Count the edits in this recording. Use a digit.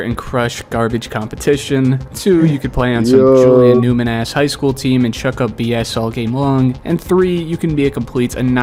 0